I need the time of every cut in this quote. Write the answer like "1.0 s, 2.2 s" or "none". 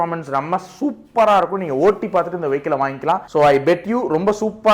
3.2 s